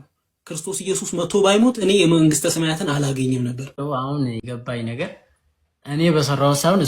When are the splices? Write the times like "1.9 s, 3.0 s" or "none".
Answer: 3.8 s